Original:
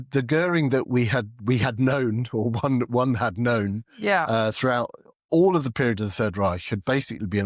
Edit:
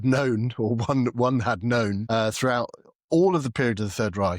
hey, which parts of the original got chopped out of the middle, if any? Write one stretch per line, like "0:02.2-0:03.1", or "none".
0:03.8-0:04.3